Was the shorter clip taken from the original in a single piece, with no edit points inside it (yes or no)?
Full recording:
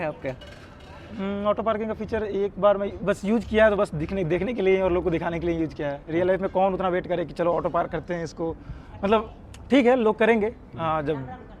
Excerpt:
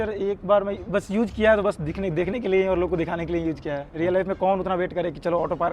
yes